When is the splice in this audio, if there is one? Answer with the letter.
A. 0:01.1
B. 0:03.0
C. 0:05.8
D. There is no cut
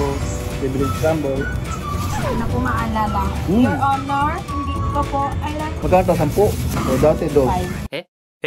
C